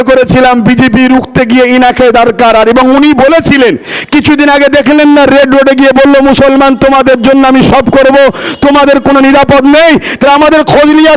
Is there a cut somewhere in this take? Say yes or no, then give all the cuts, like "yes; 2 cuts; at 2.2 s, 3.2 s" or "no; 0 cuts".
no; 0 cuts